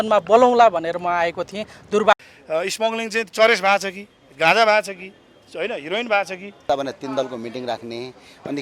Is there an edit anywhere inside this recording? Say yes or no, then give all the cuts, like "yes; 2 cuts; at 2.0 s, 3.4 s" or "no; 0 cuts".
yes; 2 cuts; at 2.1 s, 6.7 s